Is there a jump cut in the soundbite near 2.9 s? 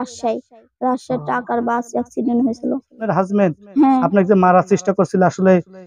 yes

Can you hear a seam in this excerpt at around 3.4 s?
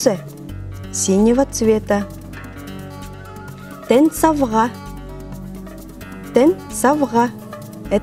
yes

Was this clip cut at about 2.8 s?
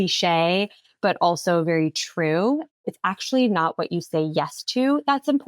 yes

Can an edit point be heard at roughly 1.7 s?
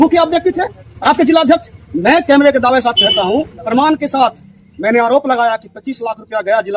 no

